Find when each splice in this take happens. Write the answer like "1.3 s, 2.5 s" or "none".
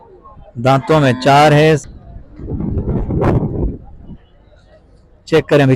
1.9 s